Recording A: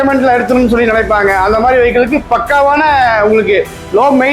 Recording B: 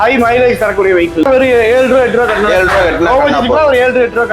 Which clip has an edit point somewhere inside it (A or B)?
B